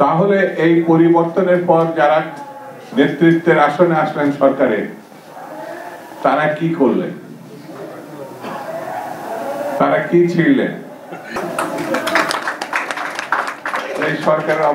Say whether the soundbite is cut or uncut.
uncut